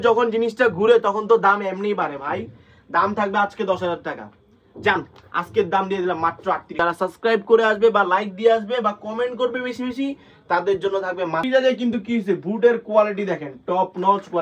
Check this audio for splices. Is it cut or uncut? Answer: cut